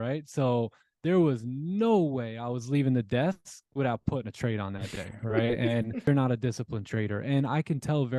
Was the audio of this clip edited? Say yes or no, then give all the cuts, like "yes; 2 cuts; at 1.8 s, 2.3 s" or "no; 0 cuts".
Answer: yes; 1 cut; at 6.1 s